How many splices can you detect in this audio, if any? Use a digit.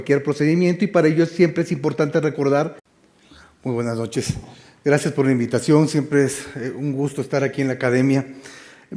0